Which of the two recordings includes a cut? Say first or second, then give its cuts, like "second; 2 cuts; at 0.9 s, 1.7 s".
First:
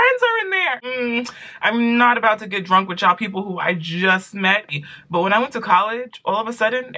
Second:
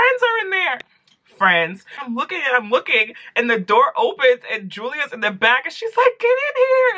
first; 2 cuts; at 0.8 s, 4.8 s